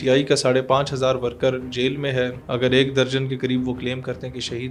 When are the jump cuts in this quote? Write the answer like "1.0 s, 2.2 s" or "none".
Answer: 2.4 s